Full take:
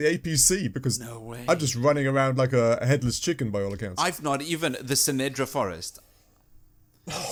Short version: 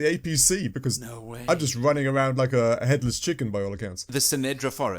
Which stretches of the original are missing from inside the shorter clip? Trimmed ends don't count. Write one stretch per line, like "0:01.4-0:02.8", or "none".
0:04.0-0:04.7